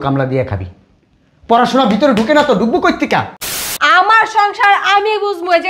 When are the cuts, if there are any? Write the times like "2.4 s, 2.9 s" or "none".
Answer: 3.7 s